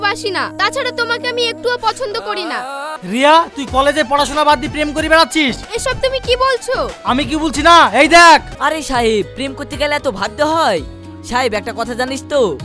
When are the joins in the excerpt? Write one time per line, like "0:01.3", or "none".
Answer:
0:02.9
0:08.5